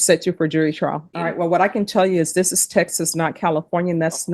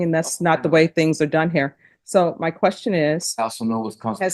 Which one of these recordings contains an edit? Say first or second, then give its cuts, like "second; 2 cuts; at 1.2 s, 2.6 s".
first; 1 cut; at 1.1 s